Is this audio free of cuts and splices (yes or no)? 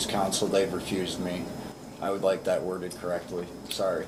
yes